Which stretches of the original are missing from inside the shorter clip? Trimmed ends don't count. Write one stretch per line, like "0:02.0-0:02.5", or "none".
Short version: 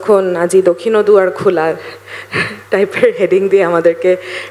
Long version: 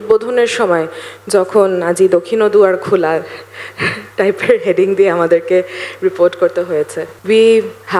none